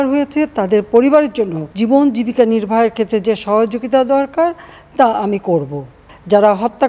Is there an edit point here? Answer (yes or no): yes